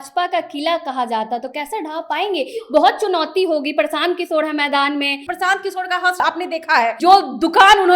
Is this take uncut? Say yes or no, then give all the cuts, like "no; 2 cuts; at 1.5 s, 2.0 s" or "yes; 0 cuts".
no; 2 cuts; at 5.2 s, 6.4 s